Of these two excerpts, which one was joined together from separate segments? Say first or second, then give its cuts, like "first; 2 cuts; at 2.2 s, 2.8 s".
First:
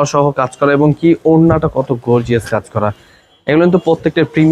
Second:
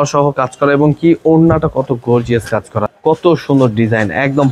second; 1 cut; at 2.8 s